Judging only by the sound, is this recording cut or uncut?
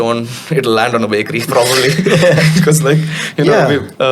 uncut